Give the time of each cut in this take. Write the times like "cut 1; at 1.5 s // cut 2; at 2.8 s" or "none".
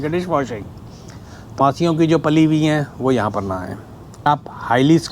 cut 1; at 1.6 s // cut 2; at 4.3 s